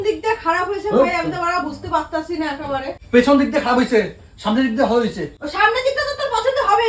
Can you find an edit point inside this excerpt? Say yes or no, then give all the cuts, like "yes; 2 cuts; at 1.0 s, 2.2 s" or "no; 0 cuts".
yes; 2 cuts; at 3.0 s, 5.3 s